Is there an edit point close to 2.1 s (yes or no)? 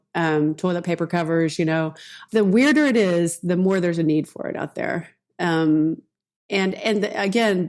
yes